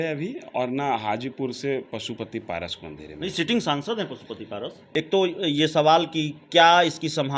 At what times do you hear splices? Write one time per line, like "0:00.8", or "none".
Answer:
0:04.8